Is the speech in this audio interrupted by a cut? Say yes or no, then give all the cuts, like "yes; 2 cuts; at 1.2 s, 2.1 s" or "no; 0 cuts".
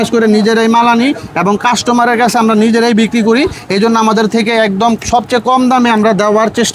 no; 0 cuts